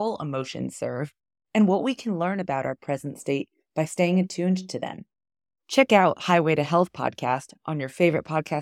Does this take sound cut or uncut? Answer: uncut